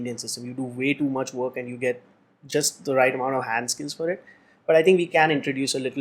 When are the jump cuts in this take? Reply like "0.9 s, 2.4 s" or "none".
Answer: none

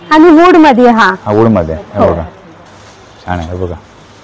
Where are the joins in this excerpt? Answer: none

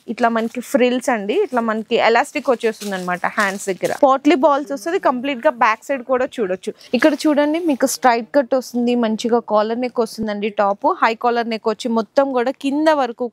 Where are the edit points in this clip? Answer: 3.9 s, 6.9 s, 10.2 s

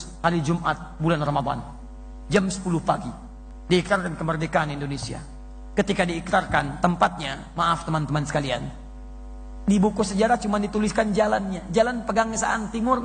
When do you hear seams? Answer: none

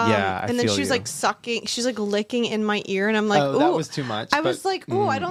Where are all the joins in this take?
none

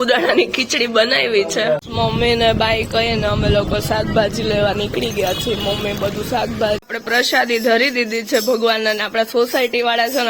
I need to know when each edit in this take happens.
1.9 s, 6.8 s

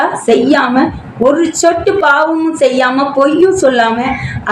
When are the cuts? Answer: none

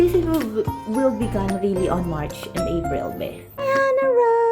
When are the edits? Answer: 3.5 s

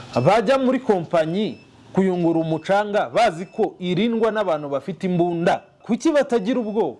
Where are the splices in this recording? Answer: 5.8 s

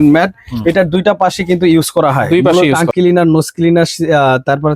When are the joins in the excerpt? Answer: 2.8 s

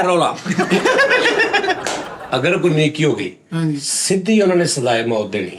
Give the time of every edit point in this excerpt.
2.1 s

